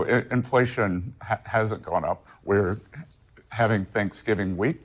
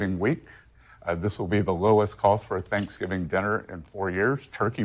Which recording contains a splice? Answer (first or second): first